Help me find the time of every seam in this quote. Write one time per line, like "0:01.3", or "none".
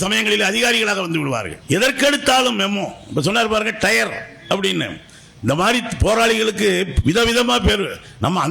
0:01.5